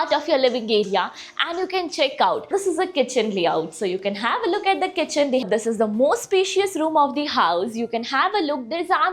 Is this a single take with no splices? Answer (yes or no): no